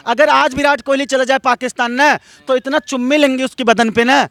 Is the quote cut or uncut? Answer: uncut